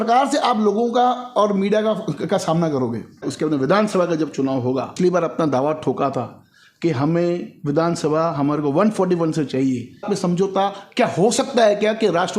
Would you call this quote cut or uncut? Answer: cut